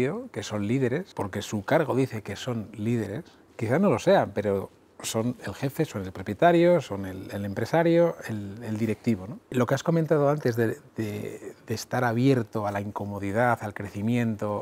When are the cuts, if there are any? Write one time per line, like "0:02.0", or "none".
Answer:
0:01.1
0:09.5